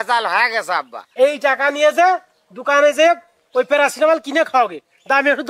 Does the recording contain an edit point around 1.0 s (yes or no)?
yes